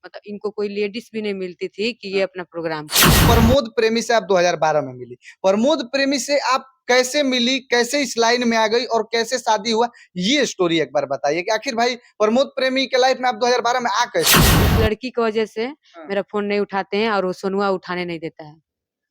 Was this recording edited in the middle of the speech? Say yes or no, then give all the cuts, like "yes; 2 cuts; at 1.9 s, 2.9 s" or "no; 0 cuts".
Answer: yes; 2 cuts; at 3.2 s, 14.4 s